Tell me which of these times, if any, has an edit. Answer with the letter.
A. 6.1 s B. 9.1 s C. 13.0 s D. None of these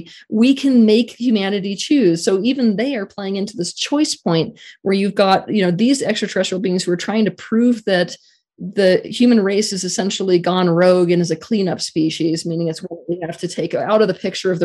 D